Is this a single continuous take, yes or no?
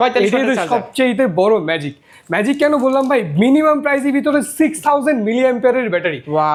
yes